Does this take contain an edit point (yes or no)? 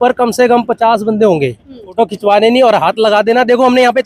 yes